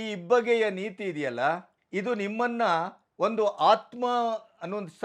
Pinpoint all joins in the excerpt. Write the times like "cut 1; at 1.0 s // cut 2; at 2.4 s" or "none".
cut 1; at 1.7 s // cut 2; at 3.0 s